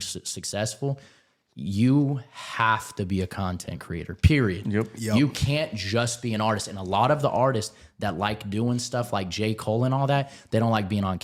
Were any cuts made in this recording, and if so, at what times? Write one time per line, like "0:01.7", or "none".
none